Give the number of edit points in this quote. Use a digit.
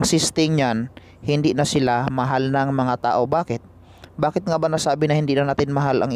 0